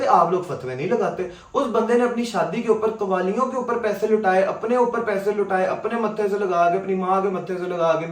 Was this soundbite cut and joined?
no; 0 cuts

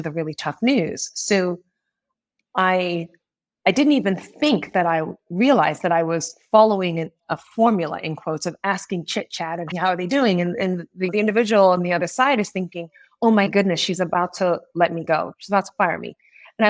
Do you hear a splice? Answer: yes; 2 cuts; at 9.7 s, 11.1 s

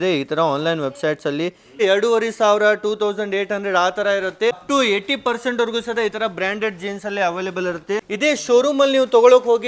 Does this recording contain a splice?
yes; 3 cuts; at 1.8 s, 4.6 s, 8.1 s

